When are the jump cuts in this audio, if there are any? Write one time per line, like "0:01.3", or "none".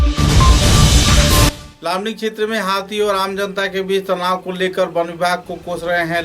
0:01.5